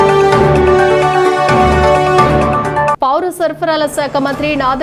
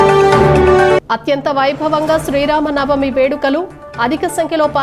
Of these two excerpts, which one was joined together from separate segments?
second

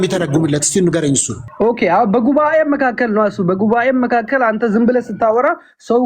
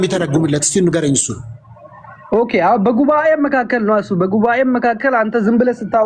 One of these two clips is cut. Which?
first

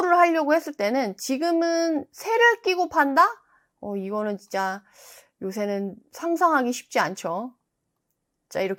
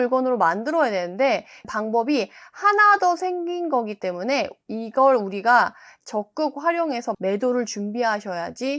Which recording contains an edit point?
second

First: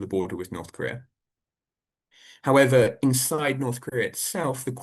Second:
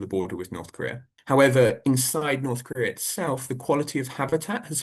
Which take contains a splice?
second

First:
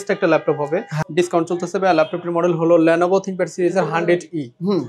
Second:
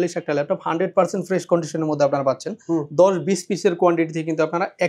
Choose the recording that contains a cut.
first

